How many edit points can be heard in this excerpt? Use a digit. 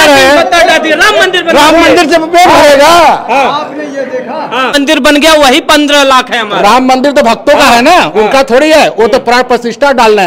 1